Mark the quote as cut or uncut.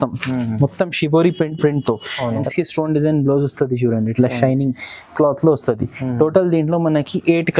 cut